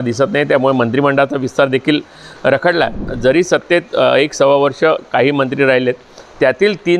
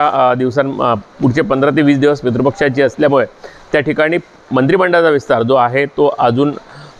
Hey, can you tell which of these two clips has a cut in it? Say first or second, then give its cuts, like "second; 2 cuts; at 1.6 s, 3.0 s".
first; 1 cut; at 3.1 s